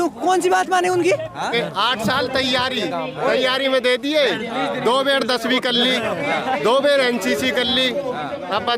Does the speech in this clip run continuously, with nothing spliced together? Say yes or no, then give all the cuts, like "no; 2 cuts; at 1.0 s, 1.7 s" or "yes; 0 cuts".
no; 1 cut; at 1.5 s